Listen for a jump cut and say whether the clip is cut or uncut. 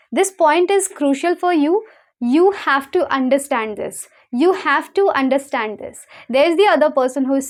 uncut